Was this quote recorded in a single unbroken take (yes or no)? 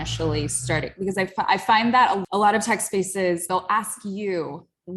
no